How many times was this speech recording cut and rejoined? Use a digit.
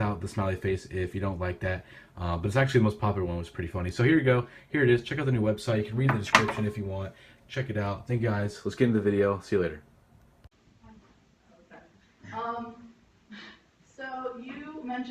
1